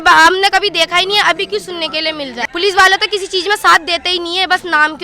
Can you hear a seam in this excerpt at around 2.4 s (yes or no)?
yes